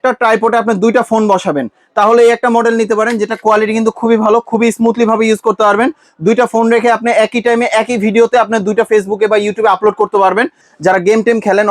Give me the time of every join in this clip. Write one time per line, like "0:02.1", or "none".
0:10.6